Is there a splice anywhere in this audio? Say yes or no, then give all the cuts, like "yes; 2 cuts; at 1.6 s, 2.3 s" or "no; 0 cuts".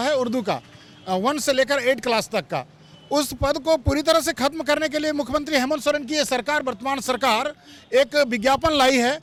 no; 0 cuts